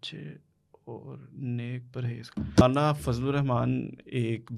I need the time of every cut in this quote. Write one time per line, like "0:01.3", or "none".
0:02.6